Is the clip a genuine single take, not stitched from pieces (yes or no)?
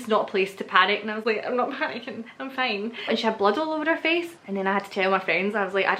no